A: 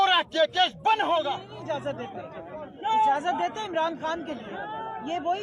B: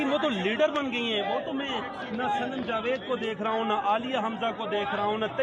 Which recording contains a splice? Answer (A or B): A